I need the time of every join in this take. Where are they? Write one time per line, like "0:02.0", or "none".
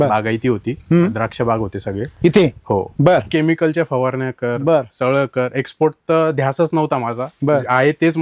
0:03.3